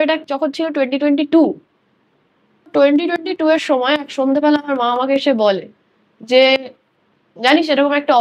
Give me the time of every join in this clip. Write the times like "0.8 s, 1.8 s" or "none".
2.7 s